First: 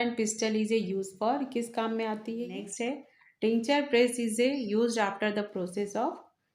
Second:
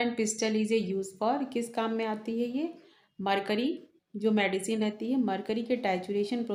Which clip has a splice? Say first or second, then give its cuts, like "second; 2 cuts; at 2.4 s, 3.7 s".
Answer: first; 1 cut; at 2.5 s